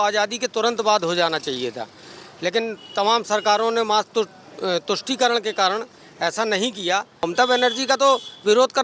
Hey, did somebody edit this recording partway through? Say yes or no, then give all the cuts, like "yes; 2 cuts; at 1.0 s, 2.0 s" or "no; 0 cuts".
yes; 1 cut; at 7.3 s